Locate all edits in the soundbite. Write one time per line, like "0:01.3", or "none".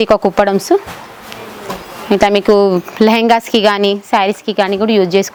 none